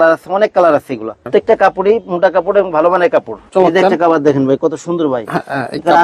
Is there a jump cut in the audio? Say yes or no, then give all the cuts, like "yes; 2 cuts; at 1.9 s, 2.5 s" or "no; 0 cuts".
yes; 2 cuts; at 1.3 s, 3.4 s